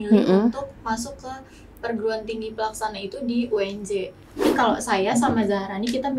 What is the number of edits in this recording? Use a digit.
1